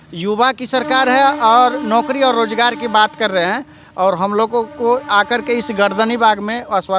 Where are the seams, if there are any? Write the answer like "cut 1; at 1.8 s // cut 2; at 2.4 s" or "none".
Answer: none